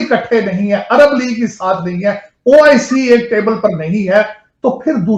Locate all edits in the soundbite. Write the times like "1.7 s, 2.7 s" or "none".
none